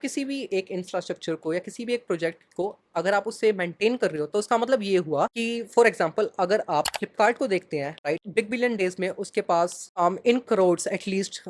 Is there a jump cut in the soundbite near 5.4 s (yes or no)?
no